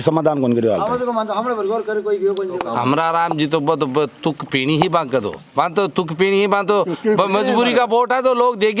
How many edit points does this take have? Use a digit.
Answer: 1